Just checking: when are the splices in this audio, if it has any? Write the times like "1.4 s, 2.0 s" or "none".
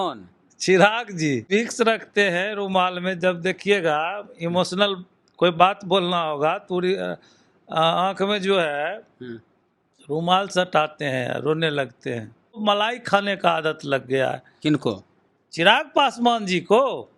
1.5 s, 12.6 s